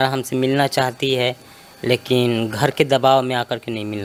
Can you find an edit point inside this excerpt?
no; 0 cuts

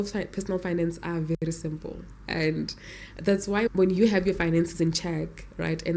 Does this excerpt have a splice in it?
yes; 1 cut; at 3.7 s

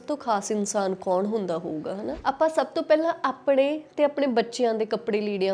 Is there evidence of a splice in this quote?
yes; 1 cut; at 2.1 s

